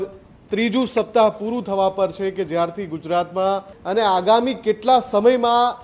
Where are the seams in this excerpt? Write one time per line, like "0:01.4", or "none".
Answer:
0:03.7